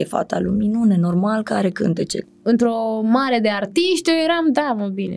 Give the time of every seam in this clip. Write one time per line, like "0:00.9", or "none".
0:02.2